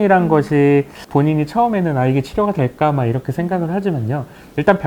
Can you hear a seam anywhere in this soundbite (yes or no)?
yes